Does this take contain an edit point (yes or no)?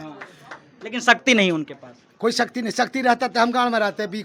no